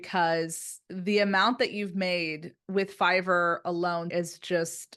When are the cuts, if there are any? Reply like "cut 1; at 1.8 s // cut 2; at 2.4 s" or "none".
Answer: cut 1; at 4.1 s

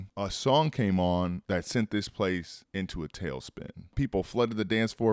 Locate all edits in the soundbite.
cut 1; at 4.0 s

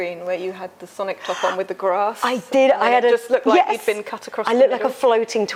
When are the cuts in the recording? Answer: none

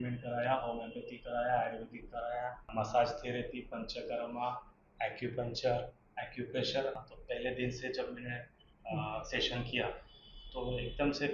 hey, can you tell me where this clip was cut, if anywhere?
cut 1; at 2.7 s // cut 2; at 7.1 s

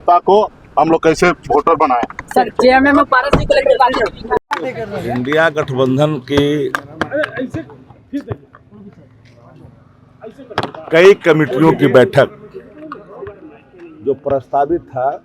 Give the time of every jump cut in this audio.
none

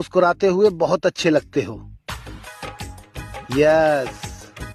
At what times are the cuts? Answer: none

